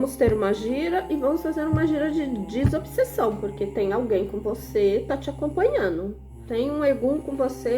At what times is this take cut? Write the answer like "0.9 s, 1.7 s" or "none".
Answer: 6.3 s